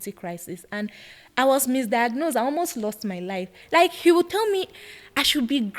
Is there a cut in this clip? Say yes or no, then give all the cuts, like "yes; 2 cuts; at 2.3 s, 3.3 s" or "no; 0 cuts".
yes; 1 cut; at 3.5 s